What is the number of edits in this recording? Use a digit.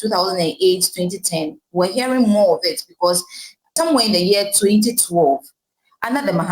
1